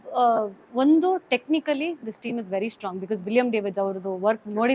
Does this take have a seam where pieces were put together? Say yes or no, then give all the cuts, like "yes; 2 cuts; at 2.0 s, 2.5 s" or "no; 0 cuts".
no; 0 cuts